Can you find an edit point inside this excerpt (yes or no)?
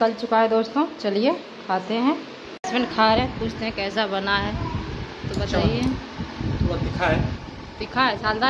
no